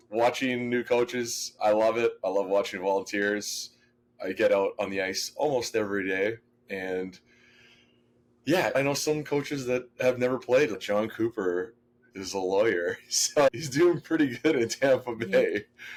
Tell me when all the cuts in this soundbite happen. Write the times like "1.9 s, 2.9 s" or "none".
none